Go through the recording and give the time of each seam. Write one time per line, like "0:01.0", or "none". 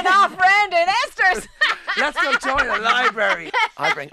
none